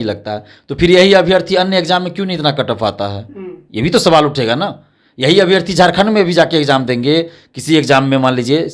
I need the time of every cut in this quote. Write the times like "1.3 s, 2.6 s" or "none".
none